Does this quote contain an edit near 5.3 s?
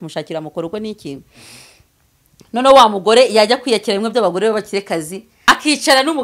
yes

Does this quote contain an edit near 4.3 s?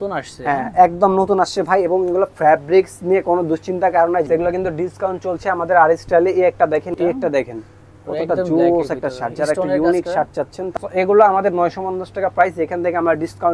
yes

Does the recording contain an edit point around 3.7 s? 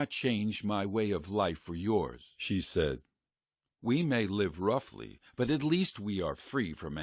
yes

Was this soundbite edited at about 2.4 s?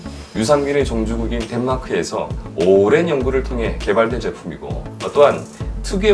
yes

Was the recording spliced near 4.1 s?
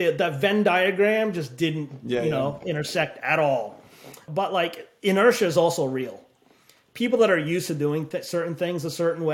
yes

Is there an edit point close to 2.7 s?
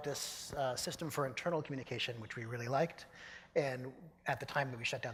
no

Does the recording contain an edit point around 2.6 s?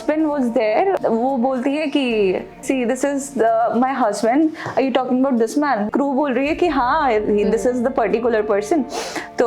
yes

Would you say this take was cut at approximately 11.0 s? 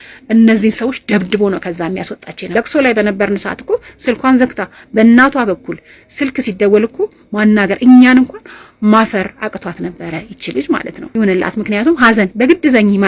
yes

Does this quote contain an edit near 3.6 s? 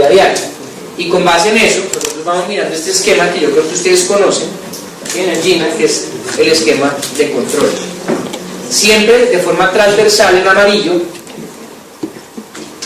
yes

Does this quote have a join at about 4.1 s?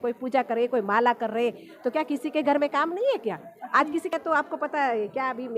yes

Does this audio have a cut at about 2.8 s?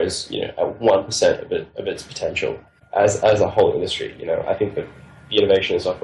yes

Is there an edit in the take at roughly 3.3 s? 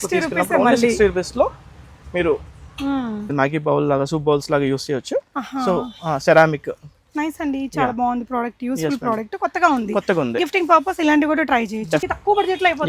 yes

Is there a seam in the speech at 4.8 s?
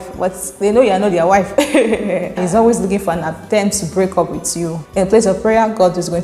yes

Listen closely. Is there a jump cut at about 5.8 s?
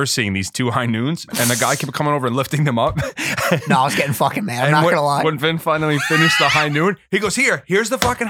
no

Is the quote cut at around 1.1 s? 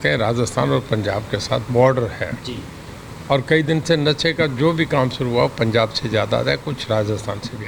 no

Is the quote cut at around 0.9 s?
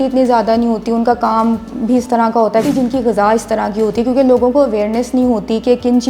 no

